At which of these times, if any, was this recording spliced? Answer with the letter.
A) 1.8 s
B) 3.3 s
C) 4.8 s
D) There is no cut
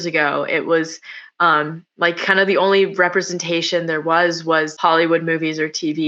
C